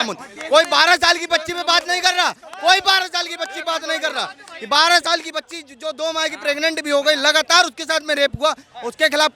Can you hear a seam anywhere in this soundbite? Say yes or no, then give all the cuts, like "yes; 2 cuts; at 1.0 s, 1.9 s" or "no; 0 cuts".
no; 0 cuts